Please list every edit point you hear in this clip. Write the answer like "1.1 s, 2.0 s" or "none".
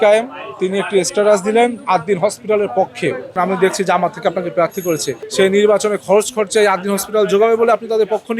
3.3 s, 5.2 s

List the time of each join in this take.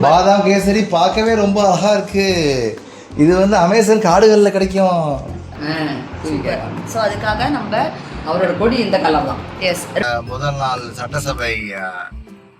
5.5 s, 10.0 s

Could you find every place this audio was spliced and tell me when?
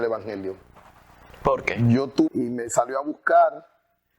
2.3 s

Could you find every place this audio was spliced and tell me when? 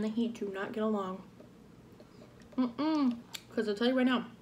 3.3 s

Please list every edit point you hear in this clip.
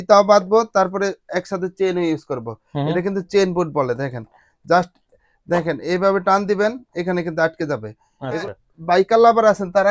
8.4 s

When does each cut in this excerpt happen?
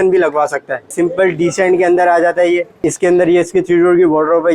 0.9 s, 2.8 s

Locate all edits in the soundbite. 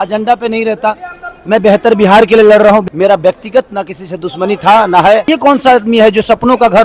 2.8 s, 5.2 s

